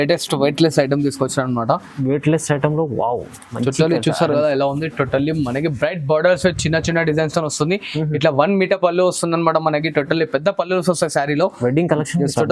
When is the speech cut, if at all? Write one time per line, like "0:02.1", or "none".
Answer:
none